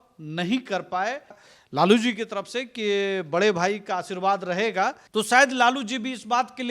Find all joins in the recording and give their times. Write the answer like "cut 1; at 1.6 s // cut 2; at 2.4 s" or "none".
cut 1; at 1.4 s // cut 2; at 5.0 s